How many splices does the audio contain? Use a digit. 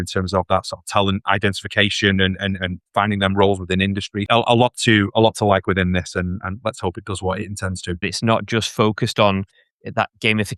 3